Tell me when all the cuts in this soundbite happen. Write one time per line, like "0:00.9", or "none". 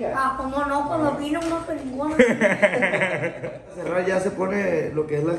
0:03.8